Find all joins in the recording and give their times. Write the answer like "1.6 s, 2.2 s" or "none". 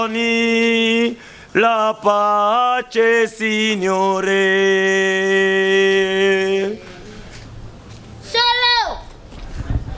none